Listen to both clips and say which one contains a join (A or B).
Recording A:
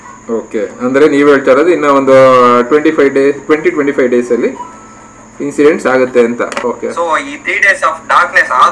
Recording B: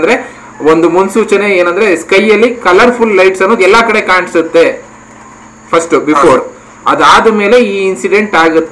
A